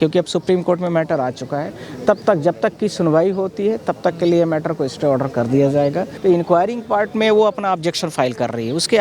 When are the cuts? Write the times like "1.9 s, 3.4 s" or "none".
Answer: 6.1 s